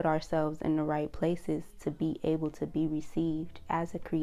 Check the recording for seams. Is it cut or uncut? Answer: uncut